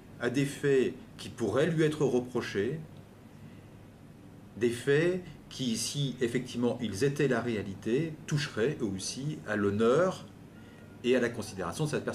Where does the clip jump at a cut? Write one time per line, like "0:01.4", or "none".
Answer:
0:04.8